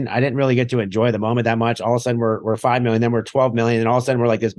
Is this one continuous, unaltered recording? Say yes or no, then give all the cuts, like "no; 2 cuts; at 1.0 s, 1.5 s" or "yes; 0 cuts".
yes; 0 cuts